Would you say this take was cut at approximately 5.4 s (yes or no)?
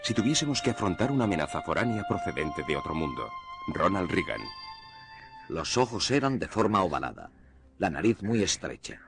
yes